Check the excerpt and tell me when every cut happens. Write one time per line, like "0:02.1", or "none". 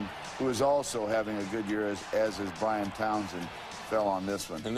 0:03.9